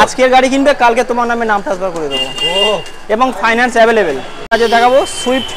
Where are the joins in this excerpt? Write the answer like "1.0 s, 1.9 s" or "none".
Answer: 4.5 s